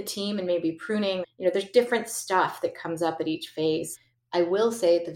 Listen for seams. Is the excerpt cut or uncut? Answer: cut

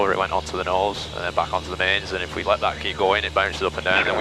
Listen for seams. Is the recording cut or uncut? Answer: uncut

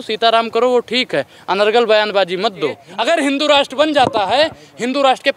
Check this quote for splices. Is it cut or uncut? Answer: cut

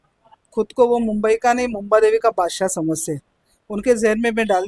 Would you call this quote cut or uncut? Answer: uncut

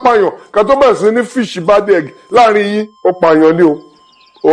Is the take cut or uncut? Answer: cut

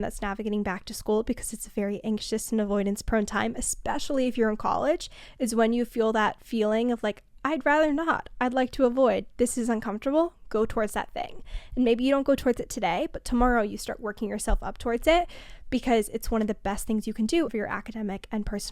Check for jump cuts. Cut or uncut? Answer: cut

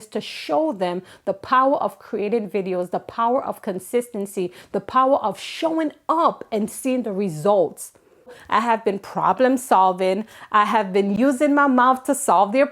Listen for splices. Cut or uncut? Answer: cut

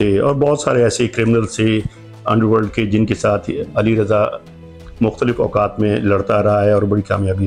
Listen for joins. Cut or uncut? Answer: uncut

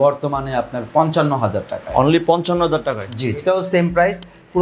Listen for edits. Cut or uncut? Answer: cut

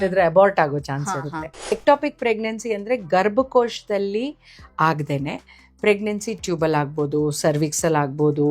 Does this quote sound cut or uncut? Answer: cut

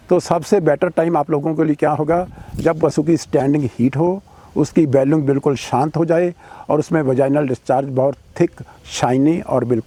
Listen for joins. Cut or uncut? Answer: uncut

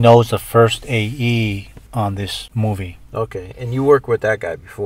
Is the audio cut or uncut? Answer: uncut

